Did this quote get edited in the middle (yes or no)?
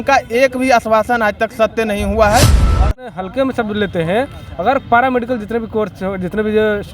yes